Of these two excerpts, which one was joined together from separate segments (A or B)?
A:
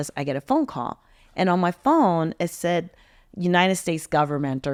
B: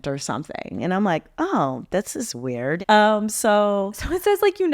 B